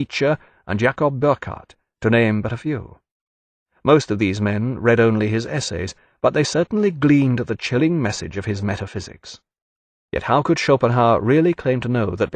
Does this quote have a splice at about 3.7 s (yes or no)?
yes